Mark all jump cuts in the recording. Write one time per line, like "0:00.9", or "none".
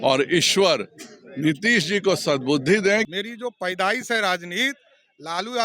0:03.1